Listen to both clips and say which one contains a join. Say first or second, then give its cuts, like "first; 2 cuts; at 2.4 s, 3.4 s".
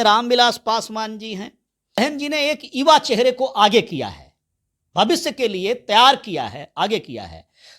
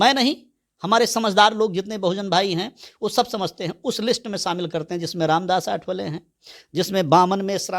first; 1 cut; at 2.0 s